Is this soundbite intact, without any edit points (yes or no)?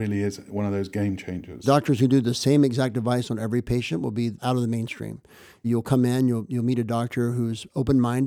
no